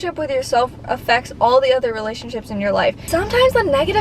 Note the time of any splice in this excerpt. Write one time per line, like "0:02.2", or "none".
0:03.0